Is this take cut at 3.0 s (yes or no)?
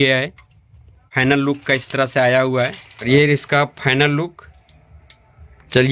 yes